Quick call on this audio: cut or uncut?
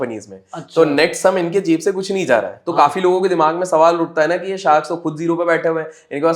uncut